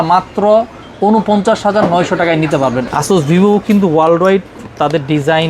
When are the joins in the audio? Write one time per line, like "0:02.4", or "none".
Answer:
0:02.8